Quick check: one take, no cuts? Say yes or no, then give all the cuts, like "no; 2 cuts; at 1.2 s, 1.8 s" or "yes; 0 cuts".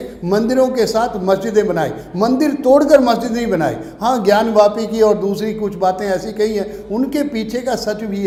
yes; 0 cuts